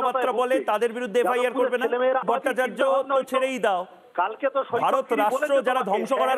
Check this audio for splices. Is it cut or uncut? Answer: cut